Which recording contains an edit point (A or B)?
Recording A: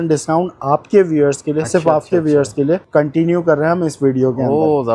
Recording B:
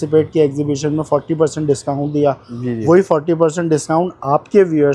A